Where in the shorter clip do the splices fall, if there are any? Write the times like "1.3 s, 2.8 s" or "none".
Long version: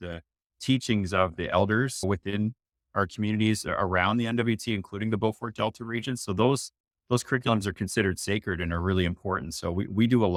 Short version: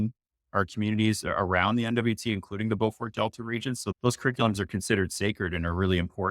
3.9 s